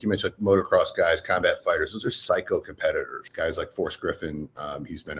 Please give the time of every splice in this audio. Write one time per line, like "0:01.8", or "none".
0:03.2